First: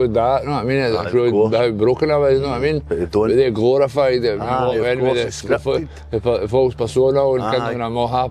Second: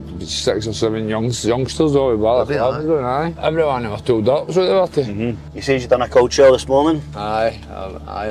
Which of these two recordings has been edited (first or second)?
second